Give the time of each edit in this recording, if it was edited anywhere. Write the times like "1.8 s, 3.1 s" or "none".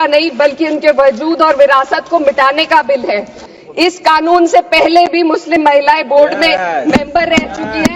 3.4 s